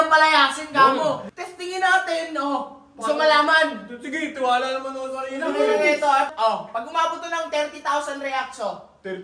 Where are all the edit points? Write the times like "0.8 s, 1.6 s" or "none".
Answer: 1.3 s, 6.3 s